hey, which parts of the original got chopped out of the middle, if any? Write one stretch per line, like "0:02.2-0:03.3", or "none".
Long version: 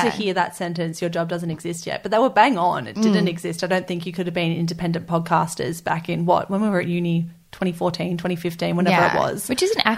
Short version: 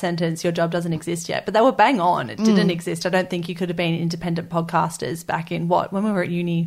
none